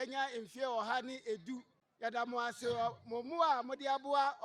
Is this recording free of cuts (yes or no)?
no